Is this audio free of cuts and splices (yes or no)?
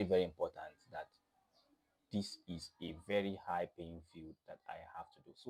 yes